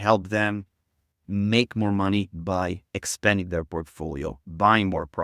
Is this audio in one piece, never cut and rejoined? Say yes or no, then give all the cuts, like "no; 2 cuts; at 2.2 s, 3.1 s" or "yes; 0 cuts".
yes; 0 cuts